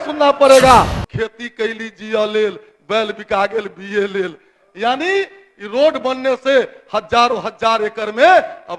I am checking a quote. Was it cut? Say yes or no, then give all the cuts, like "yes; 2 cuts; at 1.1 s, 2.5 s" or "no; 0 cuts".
yes; 1 cut; at 1.0 s